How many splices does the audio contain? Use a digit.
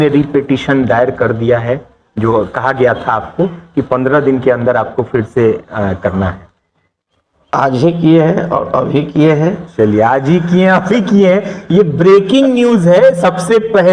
0